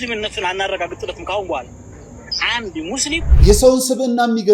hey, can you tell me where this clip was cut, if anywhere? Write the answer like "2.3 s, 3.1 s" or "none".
3.3 s